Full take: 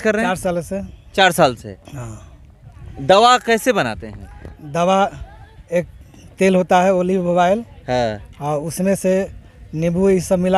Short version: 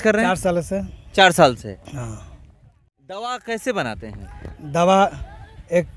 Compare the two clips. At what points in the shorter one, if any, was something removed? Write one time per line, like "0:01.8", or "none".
none